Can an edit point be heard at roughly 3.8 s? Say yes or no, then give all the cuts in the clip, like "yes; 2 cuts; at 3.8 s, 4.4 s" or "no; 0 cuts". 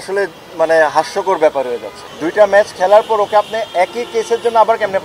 no; 1 cut; at 2.0 s